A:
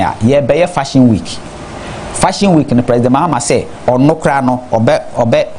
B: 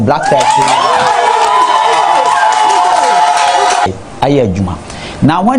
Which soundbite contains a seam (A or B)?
B